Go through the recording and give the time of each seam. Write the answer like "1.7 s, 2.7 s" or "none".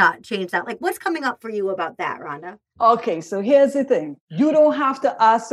4.2 s